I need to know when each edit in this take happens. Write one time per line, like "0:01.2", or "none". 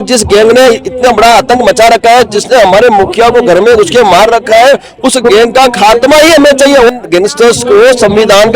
none

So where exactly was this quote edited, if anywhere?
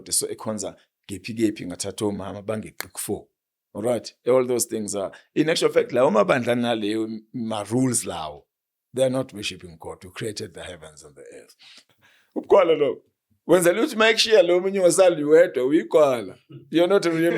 0:11.8

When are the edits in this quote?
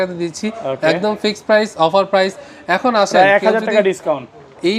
none

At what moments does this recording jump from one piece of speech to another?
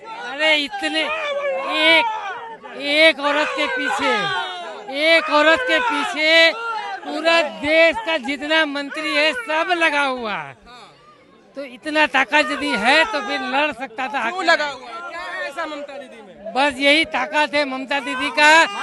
none

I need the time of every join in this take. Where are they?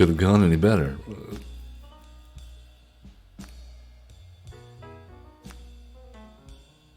none

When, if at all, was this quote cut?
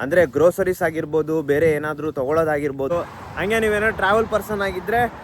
0:02.9

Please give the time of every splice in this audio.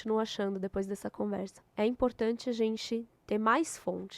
0:01.6

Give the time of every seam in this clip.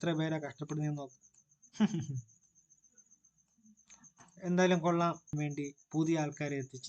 0:05.4

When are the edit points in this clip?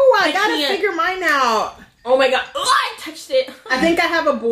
0:03.6

